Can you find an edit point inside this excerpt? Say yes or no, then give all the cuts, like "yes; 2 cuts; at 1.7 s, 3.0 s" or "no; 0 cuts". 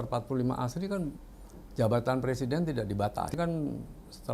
yes; 1 cut; at 3.3 s